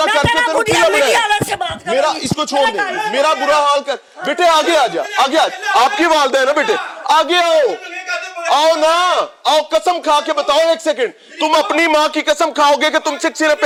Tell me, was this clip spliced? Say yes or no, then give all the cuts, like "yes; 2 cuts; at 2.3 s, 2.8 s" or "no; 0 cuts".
no; 0 cuts